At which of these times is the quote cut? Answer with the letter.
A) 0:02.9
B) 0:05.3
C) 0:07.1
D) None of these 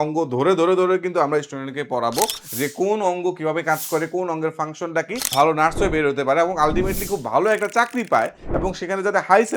B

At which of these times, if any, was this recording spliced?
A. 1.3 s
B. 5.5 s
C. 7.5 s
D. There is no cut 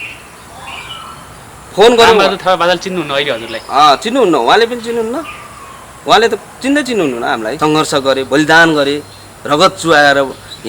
C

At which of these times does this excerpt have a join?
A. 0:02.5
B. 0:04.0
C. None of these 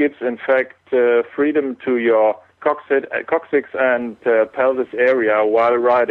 A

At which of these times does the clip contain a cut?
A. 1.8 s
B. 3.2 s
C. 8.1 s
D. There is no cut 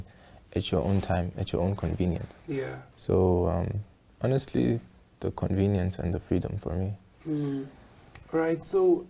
D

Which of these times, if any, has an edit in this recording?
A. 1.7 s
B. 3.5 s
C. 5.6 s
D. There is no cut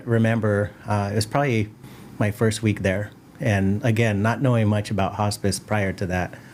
D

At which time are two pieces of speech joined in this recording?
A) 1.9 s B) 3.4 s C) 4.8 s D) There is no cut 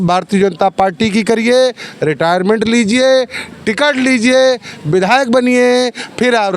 D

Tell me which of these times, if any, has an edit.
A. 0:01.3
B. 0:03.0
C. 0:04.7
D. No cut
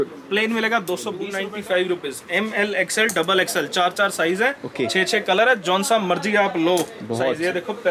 A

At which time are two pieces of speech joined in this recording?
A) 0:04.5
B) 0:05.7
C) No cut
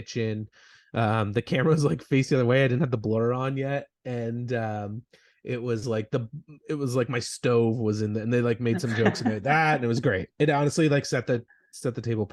C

